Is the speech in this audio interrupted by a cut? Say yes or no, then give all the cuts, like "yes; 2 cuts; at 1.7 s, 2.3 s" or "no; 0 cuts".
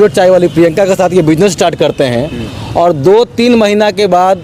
no; 0 cuts